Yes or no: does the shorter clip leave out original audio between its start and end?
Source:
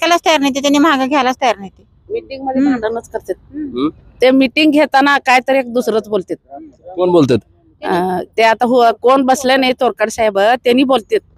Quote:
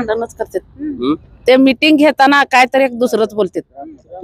no